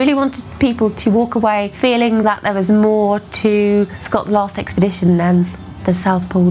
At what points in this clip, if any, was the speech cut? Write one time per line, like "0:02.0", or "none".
0:01.7
0:04.0